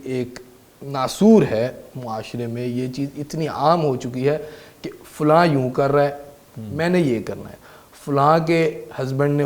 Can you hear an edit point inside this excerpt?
no; 0 cuts

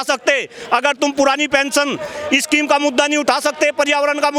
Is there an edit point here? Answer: no; 0 cuts

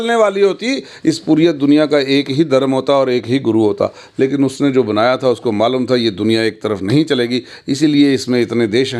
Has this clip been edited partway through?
no; 0 cuts

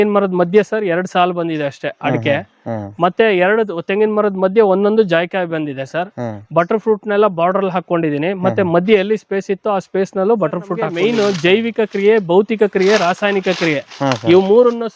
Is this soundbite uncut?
no; 1 cut; at 10.8 s

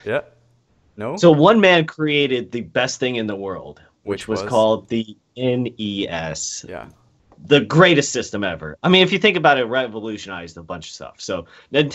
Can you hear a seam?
yes; 1 cut; at 9.9 s

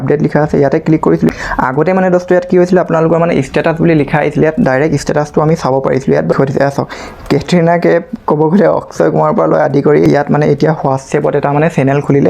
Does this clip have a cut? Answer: yes; 3 cuts; at 1.3 s, 6.3 s, 10.0 s

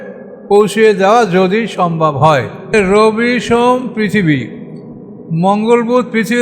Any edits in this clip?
yes; 1 cut; at 2.7 s

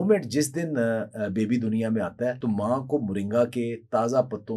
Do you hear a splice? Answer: yes; 1 cut; at 2.4 s

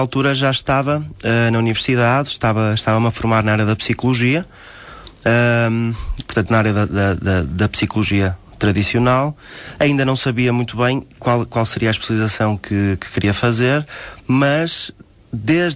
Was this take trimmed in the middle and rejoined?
yes; 1 cut; at 4.3 s

